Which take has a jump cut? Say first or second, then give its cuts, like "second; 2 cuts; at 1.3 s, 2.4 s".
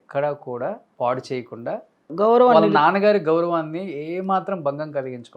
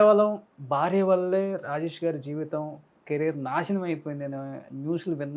first; 2 cuts; at 0.9 s, 2.1 s